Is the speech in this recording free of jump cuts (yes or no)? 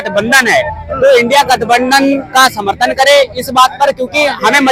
yes